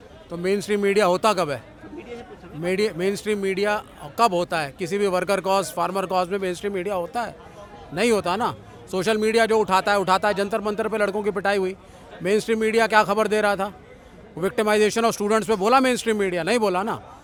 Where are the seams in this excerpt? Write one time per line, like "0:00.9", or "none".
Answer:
none